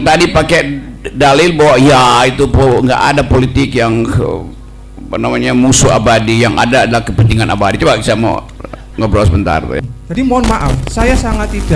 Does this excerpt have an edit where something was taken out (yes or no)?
yes